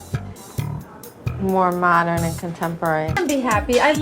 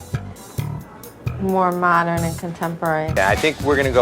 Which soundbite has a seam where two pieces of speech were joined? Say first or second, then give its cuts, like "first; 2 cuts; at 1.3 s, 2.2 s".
first; 1 cut; at 3.1 s